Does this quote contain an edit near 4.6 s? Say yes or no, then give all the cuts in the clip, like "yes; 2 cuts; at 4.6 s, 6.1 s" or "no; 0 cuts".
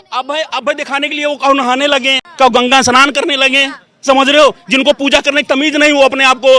no; 1 cut; at 2.2 s